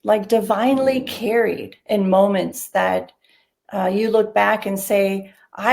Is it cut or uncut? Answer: cut